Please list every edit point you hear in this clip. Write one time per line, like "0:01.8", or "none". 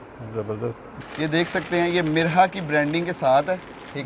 0:01.0